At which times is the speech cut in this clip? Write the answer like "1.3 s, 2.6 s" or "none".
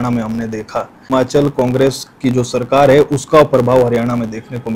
1.1 s

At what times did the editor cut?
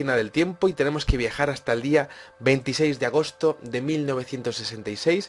2.7 s

